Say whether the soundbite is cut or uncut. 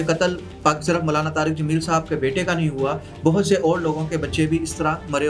uncut